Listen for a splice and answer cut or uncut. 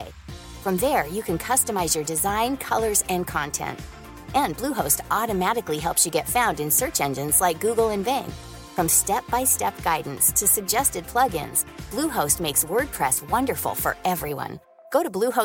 uncut